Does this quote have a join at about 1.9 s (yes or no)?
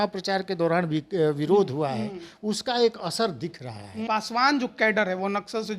no